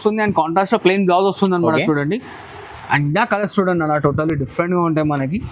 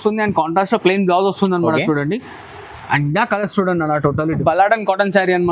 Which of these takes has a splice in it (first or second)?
second